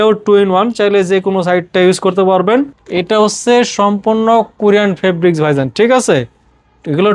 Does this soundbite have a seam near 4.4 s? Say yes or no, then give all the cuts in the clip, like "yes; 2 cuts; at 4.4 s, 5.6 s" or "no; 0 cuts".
no; 1 cut; at 2.8 s